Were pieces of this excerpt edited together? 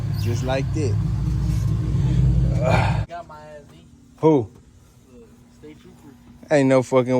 yes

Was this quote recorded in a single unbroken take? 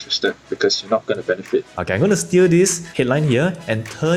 no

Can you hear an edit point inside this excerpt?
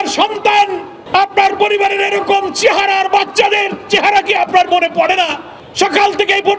no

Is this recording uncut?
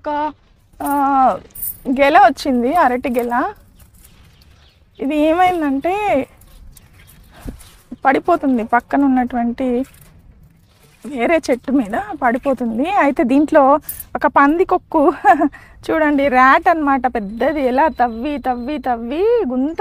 yes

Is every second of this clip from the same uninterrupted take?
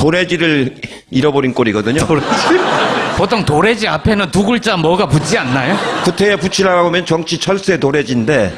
no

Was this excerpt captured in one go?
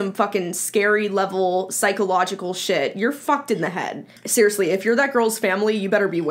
no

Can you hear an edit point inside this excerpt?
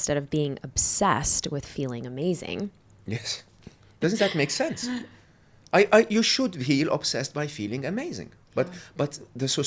no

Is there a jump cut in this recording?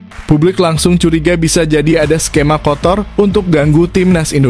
no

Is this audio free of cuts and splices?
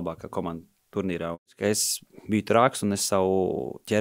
no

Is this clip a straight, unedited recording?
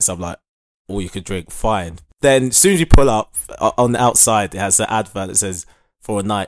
no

